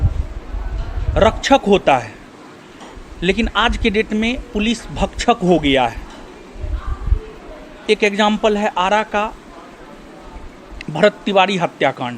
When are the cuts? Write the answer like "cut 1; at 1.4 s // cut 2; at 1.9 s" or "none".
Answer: none